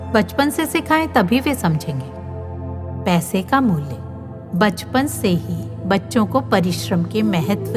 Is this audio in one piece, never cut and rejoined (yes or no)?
yes